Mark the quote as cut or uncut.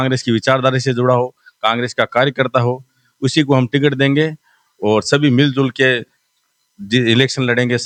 uncut